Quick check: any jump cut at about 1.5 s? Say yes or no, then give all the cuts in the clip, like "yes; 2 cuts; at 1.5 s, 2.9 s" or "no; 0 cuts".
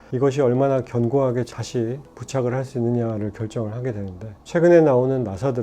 yes; 1 cut; at 1.5 s